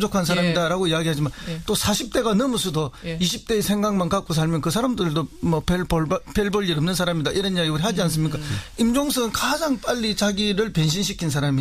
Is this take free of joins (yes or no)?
no